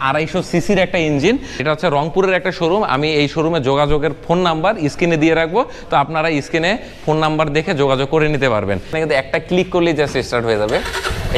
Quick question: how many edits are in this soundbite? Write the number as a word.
two